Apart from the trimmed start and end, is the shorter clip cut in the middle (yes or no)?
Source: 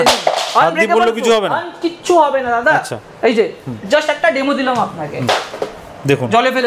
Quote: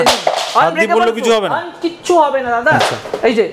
no